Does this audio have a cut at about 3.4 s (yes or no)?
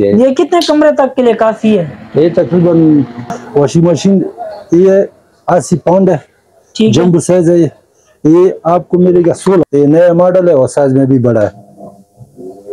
yes